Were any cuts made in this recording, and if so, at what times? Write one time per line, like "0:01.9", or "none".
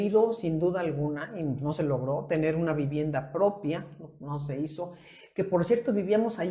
none